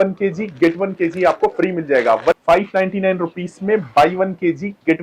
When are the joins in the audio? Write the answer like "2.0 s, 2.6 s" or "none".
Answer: 2.4 s